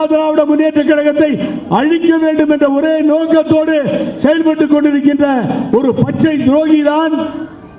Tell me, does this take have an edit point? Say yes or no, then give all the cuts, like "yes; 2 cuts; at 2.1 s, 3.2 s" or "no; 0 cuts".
no; 0 cuts